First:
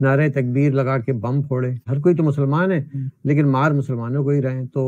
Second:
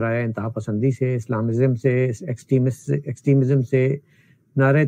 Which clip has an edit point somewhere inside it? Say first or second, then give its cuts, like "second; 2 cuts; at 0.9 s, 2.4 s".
first; 1 cut; at 1.9 s